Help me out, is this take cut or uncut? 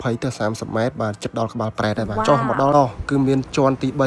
cut